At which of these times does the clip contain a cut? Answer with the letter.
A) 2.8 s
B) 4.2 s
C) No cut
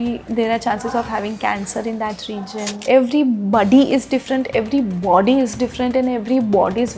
A